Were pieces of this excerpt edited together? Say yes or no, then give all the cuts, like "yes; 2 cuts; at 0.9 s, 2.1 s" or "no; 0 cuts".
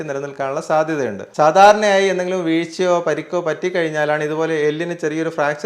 yes; 1 cut; at 1.2 s